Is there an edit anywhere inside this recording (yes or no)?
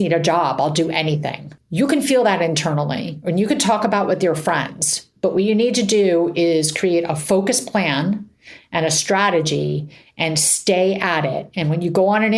no